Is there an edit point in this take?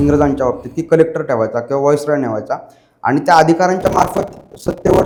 no; 0 cuts

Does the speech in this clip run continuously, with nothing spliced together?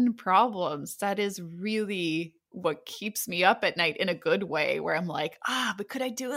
yes; 0 cuts

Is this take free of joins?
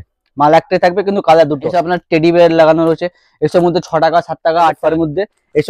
no; 2 cuts; at 1.7 s, 4.8 s

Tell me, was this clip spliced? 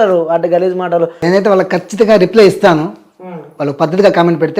yes; 1 cut; at 1.2 s

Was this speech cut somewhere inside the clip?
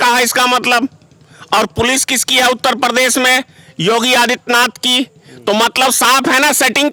no; 0 cuts

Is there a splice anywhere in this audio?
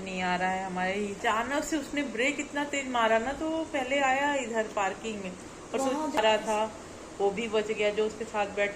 yes; 2 cuts; at 1.2 s, 6.2 s

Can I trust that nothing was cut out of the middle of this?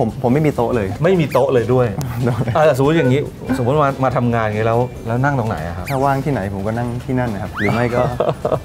yes; 0 cuts

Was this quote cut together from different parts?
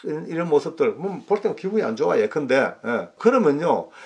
yes; 1 cut; at 3.1 s

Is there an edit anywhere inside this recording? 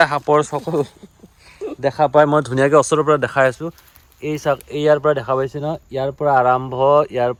no; 0 cuts

